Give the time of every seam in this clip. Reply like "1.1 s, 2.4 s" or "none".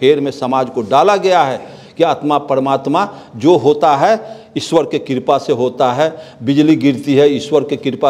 none